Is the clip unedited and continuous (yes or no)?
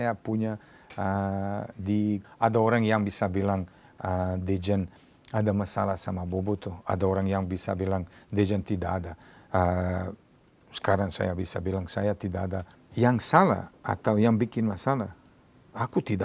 no